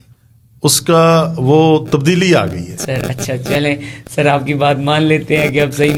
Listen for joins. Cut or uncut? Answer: uncut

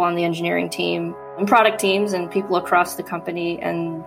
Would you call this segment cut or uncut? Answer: cut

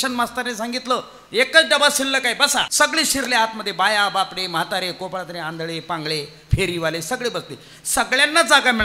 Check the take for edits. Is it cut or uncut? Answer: cut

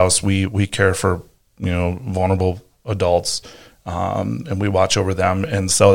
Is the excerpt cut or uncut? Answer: uncut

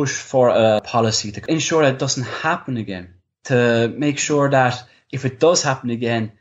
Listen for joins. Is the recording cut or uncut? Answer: cut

